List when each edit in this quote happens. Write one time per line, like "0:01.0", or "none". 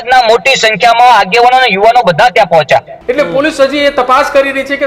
0:03.0